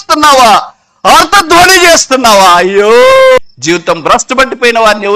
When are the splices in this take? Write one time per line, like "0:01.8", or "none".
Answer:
0:03.4